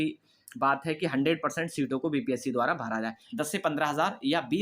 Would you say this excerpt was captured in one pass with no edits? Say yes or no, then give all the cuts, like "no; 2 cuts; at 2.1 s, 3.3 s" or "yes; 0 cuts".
no; 1 cut; at 3.4 s